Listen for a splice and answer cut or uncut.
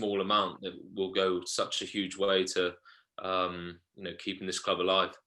uncut